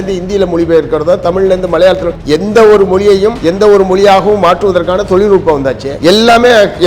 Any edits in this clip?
yes; 3 cuts; at 2.1 s, 3.4 s, 5.9 s

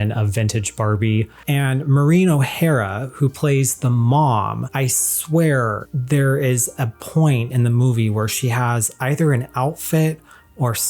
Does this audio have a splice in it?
yes; 3 cuts; at 1.4 s, 4.6 s, 5.9 s

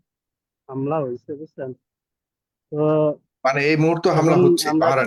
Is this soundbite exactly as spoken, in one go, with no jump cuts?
yes; 0 cuts

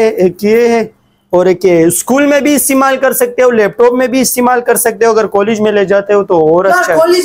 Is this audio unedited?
yes; 0 cuts

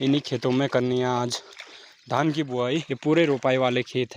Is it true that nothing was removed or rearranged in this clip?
no; 1 cut; at 2.9 s

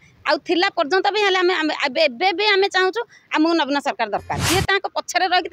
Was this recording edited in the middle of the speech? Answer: yes; 1 cut; at 4.3 s

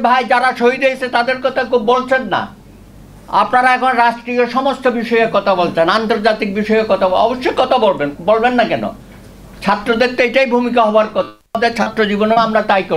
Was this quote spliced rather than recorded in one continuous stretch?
no; 0 cuts

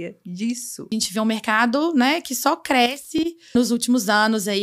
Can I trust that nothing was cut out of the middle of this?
no; 2 cuts; at 0.9 s, 3.5 s

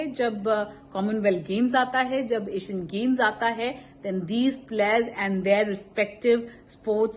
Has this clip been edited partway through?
no; 0 cuts

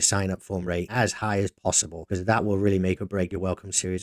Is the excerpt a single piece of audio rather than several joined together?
no; 3 cuts; at 0.9 s, 1.9 s, 3.3 s

